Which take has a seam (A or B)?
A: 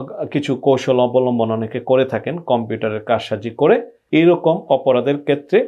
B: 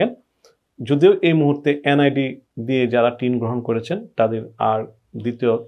A